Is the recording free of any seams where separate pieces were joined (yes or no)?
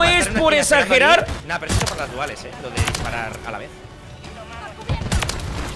no